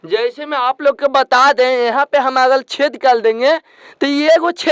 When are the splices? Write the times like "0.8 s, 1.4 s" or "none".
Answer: none